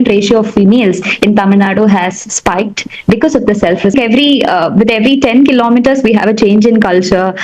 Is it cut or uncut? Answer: cut